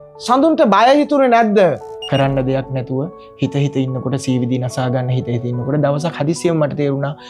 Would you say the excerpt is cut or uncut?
cut